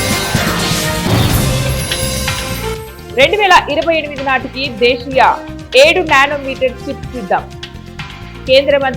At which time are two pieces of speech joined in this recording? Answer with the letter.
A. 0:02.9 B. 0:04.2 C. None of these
C